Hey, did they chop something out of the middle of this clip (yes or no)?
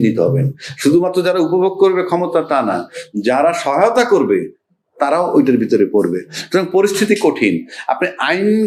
no